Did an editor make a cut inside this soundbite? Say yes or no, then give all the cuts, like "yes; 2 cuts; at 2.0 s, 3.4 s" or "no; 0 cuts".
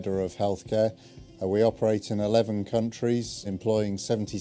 yes; 1 cut; at 3.0 s